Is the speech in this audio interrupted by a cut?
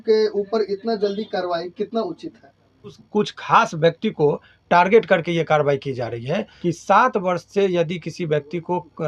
yes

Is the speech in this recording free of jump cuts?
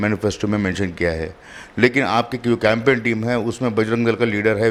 yes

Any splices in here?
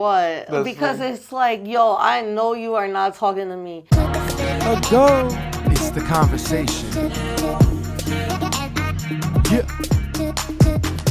yes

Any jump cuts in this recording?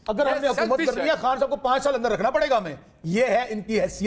no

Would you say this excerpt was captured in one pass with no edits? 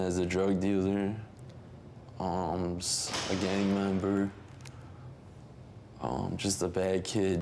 yes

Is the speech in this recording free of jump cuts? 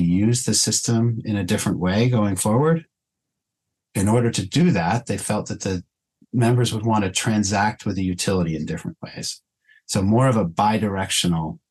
yes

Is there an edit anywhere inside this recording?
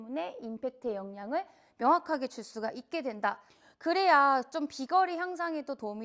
yes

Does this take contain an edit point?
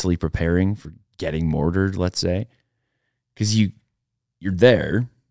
no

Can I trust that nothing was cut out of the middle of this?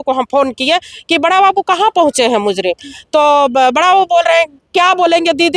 yes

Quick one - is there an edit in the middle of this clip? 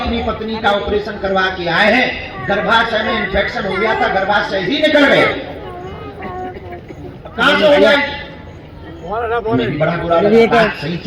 no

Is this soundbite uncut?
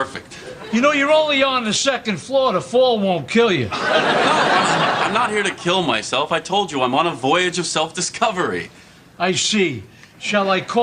yes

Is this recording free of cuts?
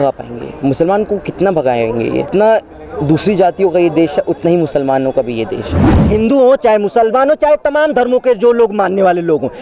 no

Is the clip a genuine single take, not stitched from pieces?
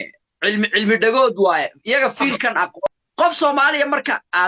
no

